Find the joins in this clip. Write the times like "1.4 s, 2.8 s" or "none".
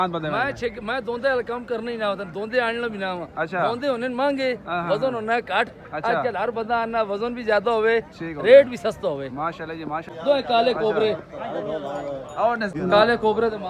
10.1 s, 12.7 s